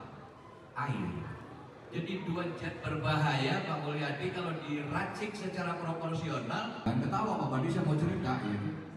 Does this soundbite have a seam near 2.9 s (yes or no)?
no